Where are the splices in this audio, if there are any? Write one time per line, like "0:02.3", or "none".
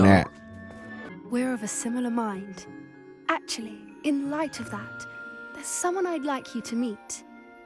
0:01.1